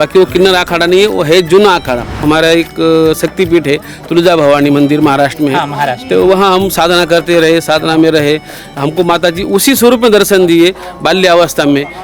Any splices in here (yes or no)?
yes